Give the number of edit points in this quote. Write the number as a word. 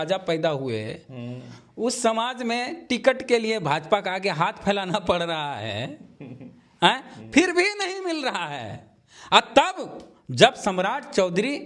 zero